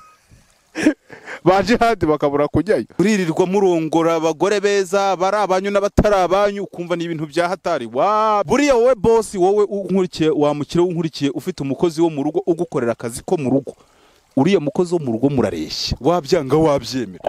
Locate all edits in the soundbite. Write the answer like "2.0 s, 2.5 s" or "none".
2.9 s, 8.5 s